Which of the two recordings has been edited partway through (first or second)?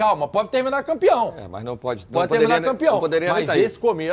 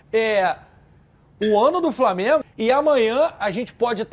second